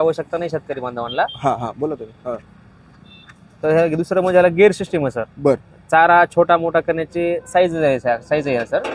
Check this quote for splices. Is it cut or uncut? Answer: uncut